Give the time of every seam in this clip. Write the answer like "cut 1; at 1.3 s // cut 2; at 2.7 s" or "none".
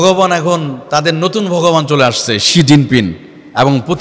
none